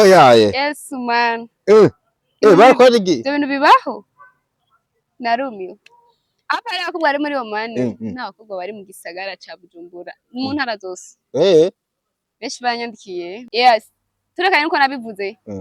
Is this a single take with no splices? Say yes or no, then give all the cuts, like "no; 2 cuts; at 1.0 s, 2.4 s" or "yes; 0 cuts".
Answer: no; 1 cut; at 13.4 s